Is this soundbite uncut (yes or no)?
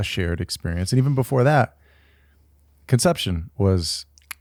yes